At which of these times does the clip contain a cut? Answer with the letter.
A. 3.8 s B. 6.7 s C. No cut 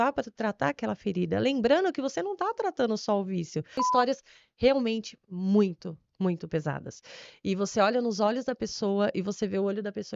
A